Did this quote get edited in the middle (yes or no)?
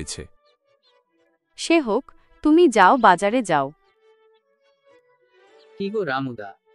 yes